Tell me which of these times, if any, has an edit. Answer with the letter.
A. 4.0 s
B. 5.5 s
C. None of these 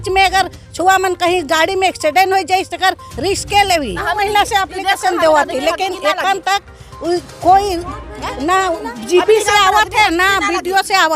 A